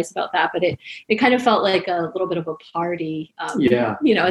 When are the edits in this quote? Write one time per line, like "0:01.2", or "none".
none